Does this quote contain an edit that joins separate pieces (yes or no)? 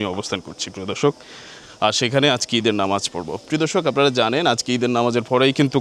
no